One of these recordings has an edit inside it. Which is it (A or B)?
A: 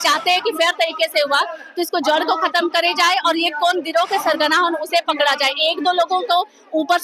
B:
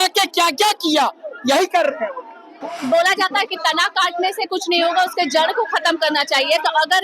B